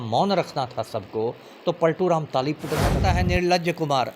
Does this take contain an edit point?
yes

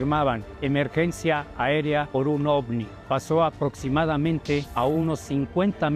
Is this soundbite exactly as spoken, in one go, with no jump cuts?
no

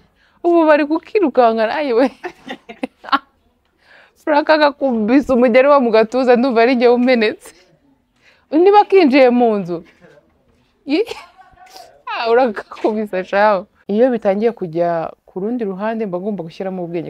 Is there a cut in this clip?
yes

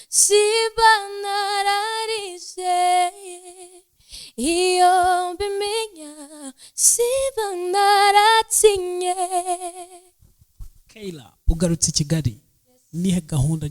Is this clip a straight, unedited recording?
yes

